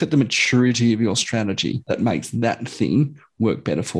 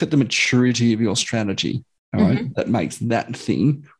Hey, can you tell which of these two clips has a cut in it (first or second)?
first